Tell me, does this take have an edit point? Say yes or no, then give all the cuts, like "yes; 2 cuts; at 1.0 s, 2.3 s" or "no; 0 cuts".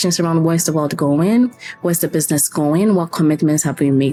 no; 0 cuts